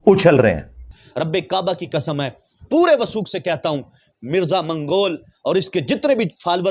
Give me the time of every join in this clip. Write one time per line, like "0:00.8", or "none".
0:01.0